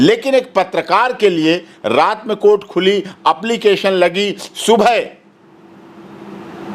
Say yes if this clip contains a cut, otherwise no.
no